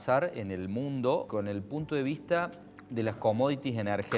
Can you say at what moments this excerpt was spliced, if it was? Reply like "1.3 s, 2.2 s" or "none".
1.3 s